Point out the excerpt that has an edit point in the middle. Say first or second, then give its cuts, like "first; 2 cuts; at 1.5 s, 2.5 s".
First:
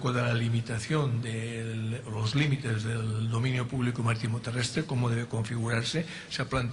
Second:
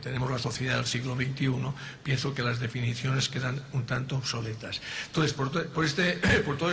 second; 1 cut; at 2.1 s